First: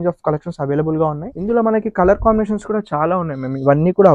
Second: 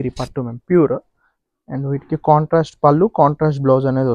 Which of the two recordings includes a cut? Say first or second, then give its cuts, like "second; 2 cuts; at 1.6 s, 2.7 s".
first; 1 cut; at 1.3 s